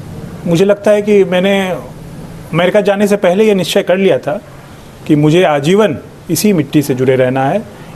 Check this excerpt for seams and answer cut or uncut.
uncut